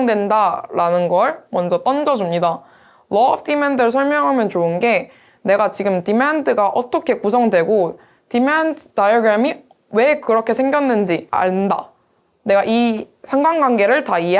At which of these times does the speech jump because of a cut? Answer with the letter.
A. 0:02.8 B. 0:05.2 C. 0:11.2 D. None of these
C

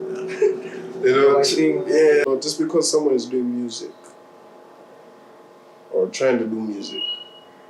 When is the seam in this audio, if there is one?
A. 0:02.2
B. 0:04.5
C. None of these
A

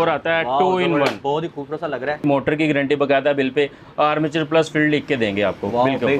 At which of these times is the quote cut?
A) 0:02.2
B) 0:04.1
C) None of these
A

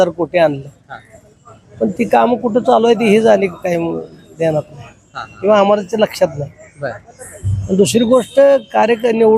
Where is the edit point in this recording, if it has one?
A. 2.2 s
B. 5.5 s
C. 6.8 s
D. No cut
D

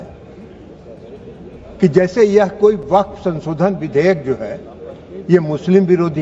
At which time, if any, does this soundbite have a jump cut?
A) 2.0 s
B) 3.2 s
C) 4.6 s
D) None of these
D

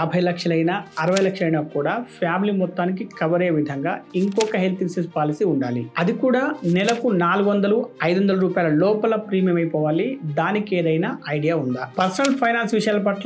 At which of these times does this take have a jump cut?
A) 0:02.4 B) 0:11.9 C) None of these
B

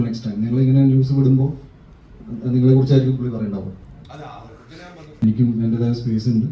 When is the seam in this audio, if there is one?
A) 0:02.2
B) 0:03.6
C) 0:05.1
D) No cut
C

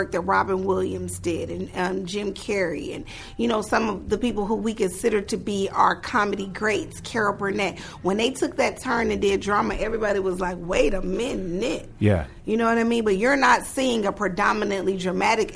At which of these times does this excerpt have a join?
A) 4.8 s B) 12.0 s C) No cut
C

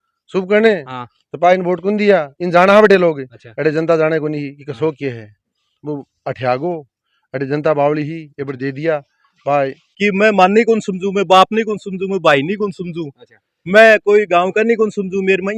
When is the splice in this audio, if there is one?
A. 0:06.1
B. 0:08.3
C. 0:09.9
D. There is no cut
C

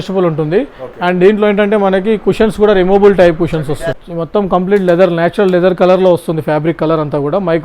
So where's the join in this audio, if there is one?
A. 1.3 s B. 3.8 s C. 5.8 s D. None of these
B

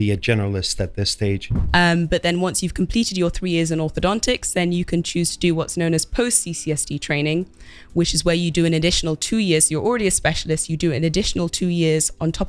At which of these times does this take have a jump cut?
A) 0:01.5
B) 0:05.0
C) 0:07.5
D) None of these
A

